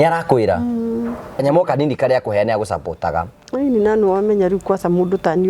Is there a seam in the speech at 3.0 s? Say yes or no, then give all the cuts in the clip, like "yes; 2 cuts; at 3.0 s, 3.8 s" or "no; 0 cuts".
no; 1 cut; at 1.4 s